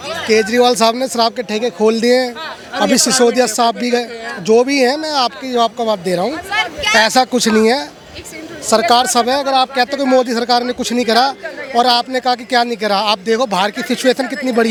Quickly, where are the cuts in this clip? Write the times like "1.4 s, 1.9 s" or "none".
none